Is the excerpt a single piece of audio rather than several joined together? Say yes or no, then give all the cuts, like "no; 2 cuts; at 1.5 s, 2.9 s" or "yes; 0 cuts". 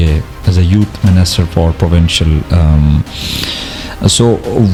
yes; 0 cuts